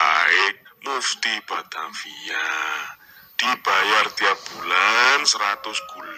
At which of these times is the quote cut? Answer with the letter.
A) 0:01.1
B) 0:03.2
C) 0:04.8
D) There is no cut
D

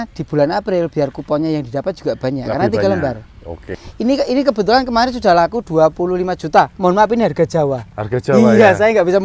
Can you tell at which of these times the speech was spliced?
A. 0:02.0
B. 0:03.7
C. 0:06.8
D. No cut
B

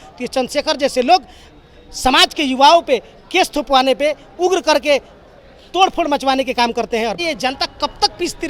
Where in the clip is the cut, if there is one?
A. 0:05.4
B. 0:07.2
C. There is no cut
B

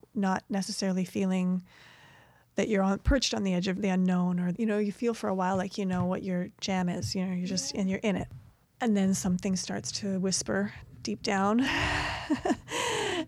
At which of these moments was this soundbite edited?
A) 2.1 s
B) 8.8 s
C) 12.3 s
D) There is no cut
D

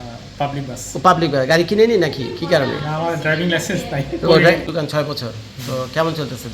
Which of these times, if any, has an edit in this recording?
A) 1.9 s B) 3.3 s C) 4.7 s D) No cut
C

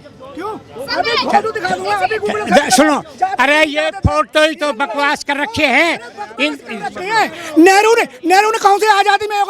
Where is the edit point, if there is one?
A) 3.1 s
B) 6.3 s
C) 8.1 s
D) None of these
D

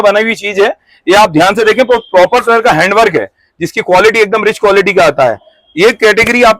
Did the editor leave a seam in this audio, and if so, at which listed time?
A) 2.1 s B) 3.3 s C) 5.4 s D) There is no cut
D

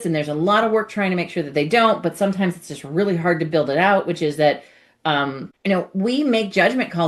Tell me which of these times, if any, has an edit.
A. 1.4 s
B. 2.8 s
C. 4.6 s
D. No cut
D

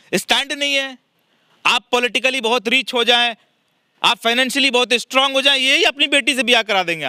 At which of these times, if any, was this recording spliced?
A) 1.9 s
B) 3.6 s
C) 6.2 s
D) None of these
D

